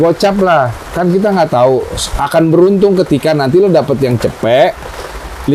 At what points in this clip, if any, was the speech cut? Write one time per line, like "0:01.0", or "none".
none